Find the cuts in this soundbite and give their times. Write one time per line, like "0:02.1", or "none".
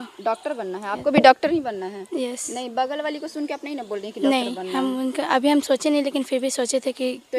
none